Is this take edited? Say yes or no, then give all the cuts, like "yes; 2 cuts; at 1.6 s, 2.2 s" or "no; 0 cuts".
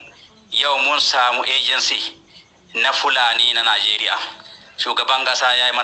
no; 0 cuts